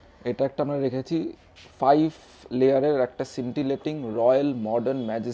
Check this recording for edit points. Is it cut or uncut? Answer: uncut